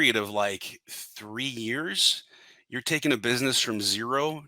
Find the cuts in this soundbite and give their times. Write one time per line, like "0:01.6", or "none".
none